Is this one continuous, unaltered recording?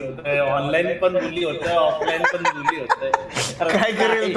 yes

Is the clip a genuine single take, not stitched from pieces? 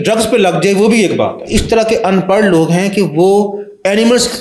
no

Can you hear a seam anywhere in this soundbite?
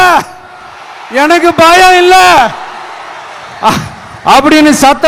no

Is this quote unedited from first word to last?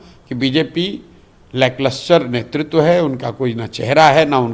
yes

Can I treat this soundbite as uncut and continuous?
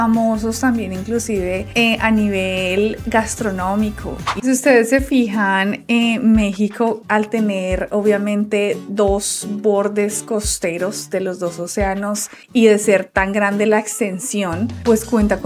no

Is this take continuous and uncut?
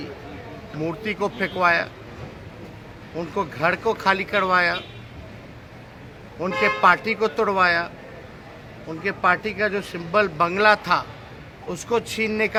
yes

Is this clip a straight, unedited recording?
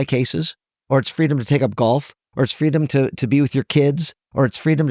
yes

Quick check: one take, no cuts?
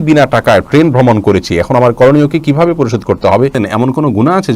no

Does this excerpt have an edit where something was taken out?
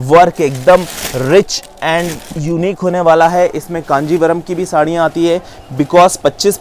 no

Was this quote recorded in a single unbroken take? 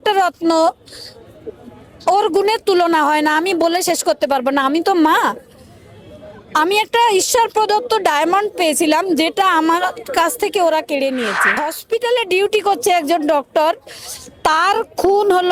no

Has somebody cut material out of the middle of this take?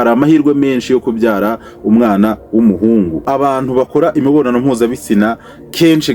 yes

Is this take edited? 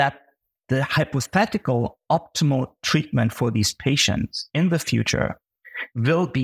no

